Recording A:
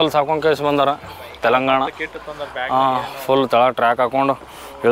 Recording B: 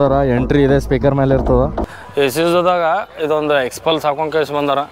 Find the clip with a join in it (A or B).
B